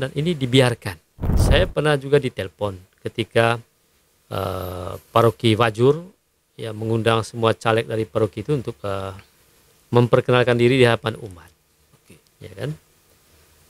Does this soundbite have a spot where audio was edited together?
yes; 1 cut; at 1.4 s

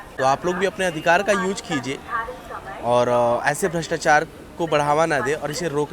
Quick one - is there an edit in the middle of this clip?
no; 0 cuts

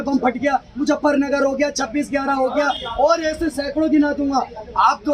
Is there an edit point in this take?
no; 0 cuts

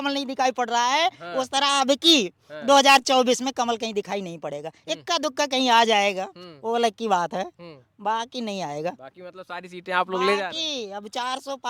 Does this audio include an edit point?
no; 0 cuts

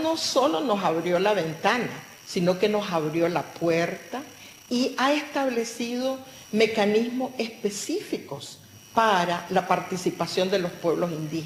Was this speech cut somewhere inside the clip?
yes; 1 cut; at 1.1 s

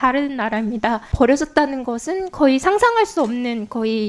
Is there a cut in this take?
yes; 1 cut; at 1.1 s

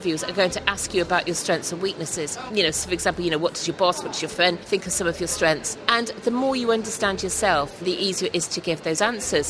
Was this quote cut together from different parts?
yes; 4 cuts; at 2.4 s, 4.6 s, 5.7 s, 7.8 s

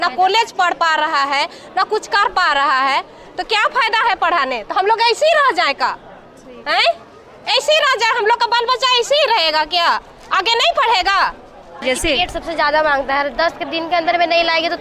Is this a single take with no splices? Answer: no; 1 cut; at 11.8 s

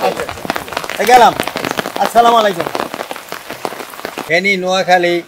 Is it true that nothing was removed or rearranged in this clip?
no; 1 cut; at 4.2 s

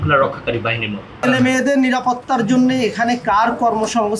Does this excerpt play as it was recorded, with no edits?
no; 1 cut; at 1.0 s

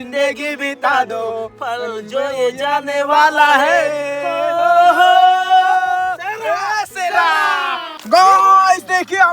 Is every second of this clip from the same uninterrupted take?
no; 1 cut; at 7.9 s

